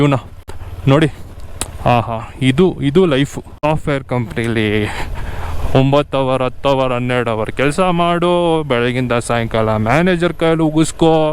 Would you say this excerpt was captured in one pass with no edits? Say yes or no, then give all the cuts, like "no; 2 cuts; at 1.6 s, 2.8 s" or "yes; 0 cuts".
no; 1 cut; at 3.6 s